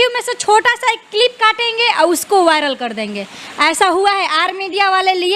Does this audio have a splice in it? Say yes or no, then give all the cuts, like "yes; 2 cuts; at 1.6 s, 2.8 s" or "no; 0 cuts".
no; 0 cuts